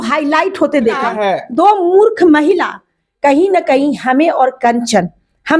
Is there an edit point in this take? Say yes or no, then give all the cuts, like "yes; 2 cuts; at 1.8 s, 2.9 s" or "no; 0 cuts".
yes; 1 cut; at 1.0 s